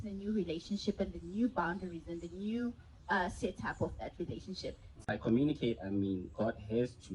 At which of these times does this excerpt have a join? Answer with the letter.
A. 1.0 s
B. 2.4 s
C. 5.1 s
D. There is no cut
C